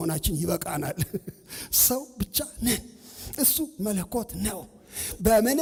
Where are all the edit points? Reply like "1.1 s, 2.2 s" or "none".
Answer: none